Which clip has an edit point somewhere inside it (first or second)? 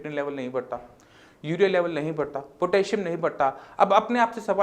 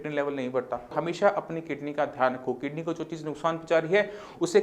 second